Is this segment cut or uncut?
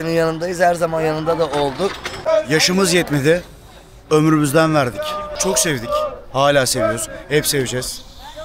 cut